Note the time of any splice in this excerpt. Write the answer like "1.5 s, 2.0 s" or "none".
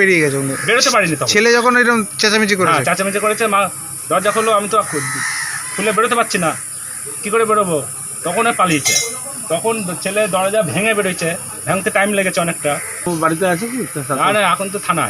13.1 s